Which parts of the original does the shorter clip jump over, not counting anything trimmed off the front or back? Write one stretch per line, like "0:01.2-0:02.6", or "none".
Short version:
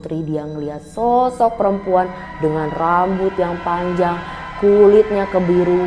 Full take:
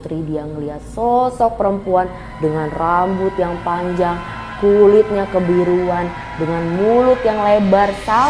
none